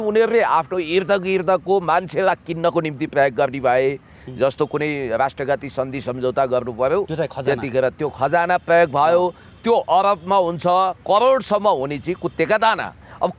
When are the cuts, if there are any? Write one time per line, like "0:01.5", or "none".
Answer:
none